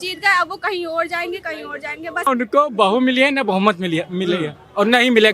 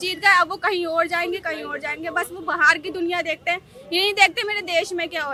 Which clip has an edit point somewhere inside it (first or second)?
first